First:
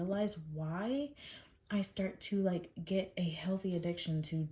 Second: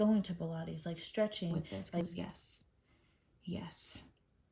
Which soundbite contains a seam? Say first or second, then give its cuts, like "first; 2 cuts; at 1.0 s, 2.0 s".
second; 1 cut; at 1.8 s